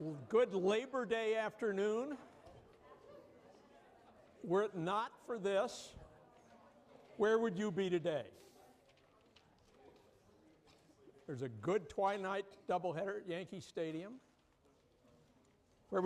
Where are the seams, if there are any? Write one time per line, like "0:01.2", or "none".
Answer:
none